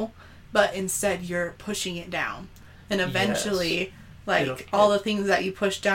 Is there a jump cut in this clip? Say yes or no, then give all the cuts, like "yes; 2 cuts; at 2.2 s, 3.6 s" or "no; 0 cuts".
no; 0 cuts